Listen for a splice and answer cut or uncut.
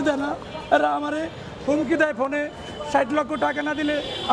uncut